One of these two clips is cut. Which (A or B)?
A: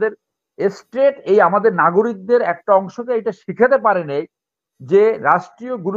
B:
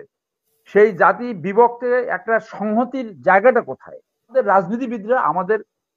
B